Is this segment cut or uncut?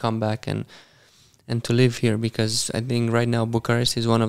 uncut